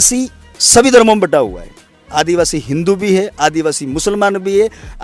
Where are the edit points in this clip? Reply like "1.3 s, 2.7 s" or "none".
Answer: none

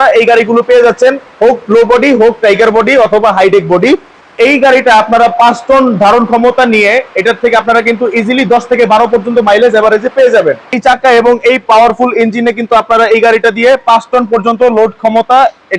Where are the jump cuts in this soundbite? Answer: 4.2 s, 10.7 s

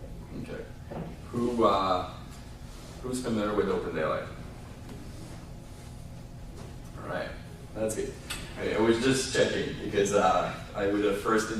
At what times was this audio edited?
3.0 s

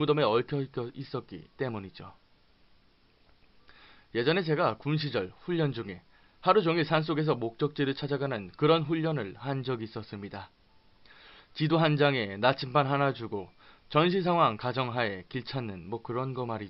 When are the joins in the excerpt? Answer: 14.0 s

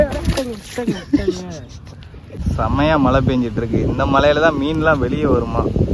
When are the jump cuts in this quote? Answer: 2.3 s

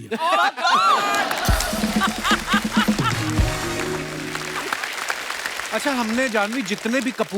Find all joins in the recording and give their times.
4.4 s, 5.6 s

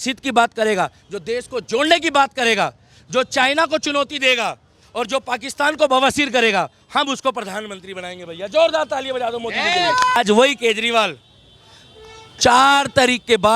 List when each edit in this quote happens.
10.2 s

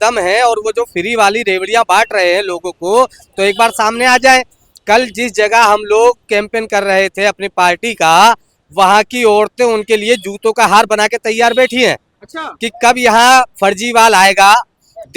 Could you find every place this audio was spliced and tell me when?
none

